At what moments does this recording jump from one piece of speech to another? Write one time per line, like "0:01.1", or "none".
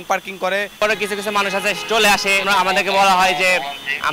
0:00.8
0:02.5